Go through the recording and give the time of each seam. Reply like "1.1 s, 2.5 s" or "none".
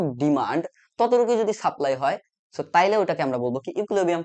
none